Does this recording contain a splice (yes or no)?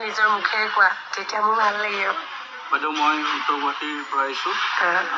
no